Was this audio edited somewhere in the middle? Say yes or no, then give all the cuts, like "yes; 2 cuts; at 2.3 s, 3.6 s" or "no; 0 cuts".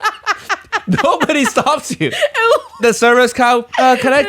yes; 1 cut; at 2.8 s